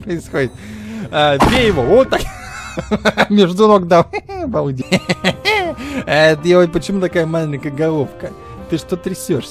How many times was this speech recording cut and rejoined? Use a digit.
1